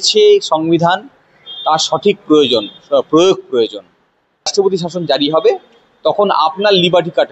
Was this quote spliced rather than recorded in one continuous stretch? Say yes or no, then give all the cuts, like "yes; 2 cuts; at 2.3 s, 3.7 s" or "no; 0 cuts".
yes; 1 cut; at 4.5 s